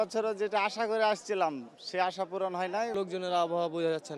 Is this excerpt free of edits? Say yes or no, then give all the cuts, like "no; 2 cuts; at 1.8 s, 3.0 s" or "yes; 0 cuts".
no; 1 cut; at 2.9 s